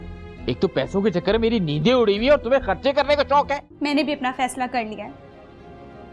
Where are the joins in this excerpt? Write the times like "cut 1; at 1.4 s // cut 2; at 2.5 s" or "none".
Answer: cut 1; at 3.7 s